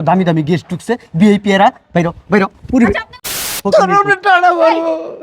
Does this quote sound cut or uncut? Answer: cut